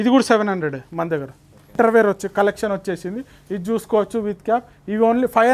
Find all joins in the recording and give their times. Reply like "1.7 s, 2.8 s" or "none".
1.7 s

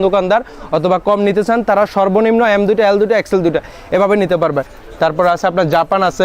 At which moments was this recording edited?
4.8 s

